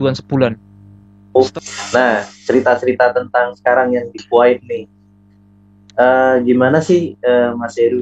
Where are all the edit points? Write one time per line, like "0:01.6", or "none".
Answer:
0:01.4

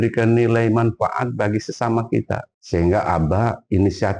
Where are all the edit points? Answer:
0:02.5

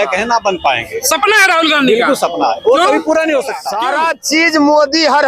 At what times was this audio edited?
0:03.7

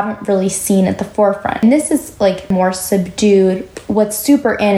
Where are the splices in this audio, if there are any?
0:01.6
0:02.5
0:03.7

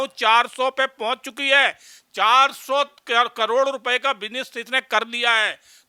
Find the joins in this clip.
none

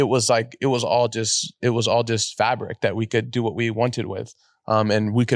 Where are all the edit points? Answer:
none

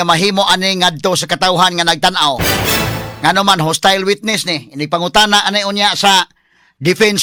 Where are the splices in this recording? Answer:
none

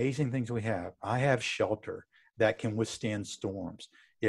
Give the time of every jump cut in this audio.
none

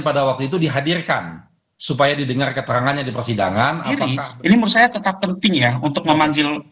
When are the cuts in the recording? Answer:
0:04.0

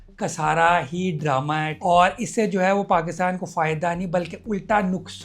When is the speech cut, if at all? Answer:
0:01.7

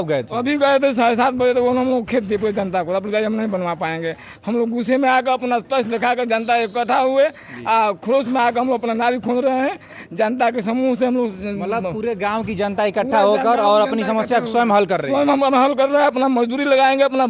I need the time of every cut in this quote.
none

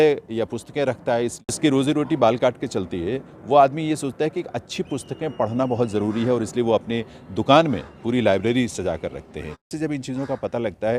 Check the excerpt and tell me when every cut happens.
0:01.4
0:09.7

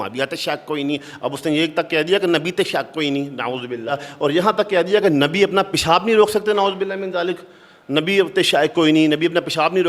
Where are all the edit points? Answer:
0:04.1

